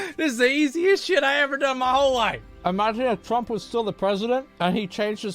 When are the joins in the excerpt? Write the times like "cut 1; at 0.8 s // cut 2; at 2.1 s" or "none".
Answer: cut 1; at 2.5 s